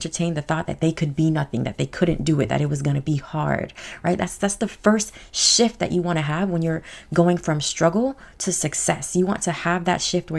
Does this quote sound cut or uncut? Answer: uncut